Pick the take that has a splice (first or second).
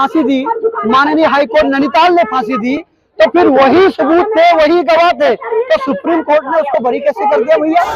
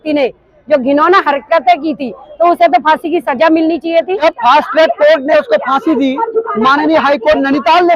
second